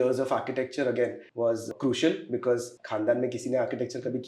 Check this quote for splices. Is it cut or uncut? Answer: cut